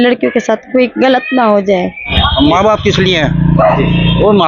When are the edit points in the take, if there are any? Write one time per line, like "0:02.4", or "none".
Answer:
0:02.1

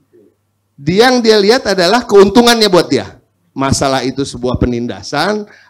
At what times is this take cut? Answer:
none

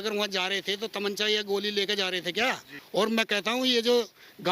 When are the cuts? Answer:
0:02.7

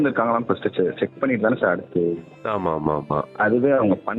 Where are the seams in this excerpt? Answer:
0:02.3
0:03.3

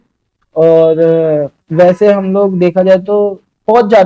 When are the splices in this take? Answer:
none

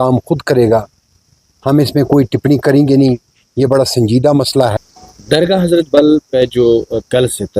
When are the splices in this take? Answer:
0:04.7

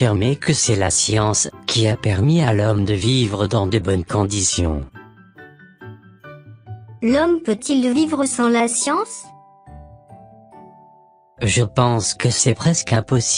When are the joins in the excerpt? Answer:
0:09.1
0:10.7

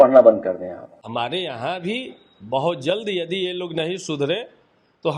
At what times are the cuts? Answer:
0:00.9

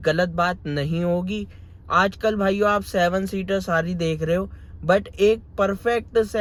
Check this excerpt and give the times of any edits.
none

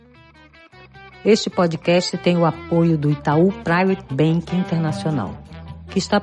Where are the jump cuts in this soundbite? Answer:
0:01.2

